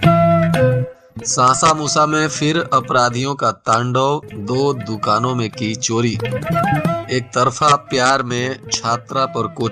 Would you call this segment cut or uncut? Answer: cut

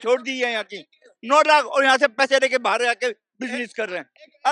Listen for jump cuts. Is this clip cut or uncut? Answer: uncut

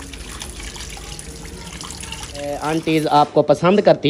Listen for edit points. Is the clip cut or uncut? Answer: cut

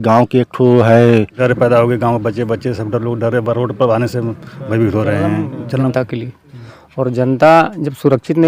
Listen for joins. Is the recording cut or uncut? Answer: cut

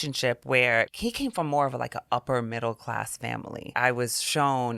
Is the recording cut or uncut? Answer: cut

